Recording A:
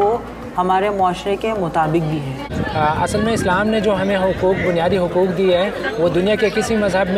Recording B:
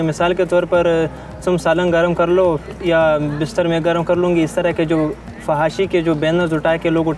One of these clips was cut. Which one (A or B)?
A